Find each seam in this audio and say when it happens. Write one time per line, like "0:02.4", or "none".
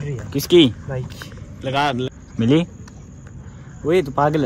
0:02.1

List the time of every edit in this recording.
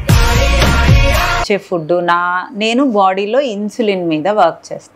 0:01.4

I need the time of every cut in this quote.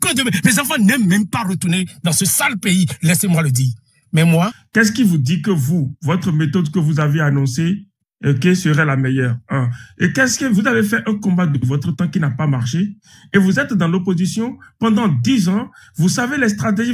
0:04.6

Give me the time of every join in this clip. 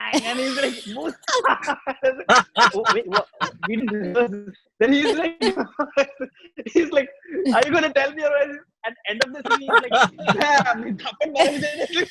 none

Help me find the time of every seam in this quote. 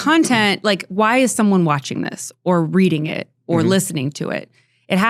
none

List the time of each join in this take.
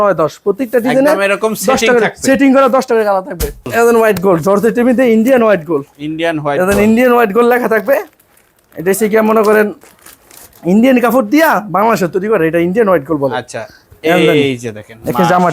0:03.7

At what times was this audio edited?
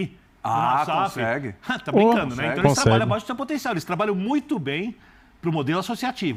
none

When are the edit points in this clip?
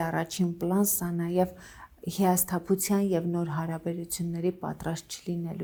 none

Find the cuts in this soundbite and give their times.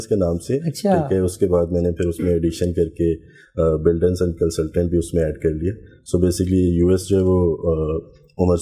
none

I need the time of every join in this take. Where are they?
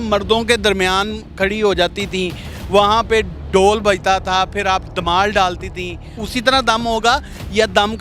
0:06.1

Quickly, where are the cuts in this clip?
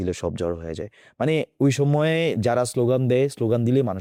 none

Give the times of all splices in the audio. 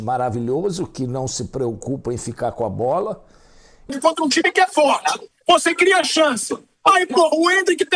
0:03.9

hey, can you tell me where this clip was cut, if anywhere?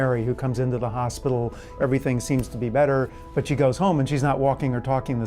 0:01.8
0:03.2

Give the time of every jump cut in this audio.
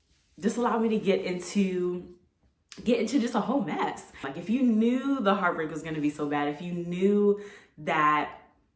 0:04.3

